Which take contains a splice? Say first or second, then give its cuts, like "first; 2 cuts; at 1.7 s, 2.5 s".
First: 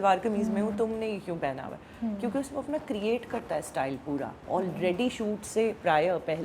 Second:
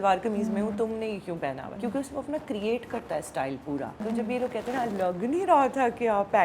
second; 2 cuts; at 1.8 s, 4.0 s